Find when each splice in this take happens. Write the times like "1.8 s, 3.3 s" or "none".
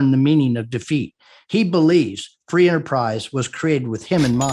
none

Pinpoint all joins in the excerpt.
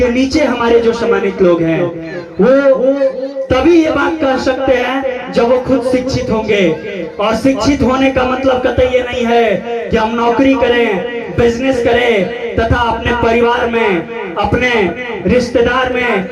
none

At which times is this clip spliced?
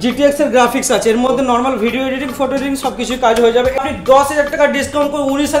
3.8 s

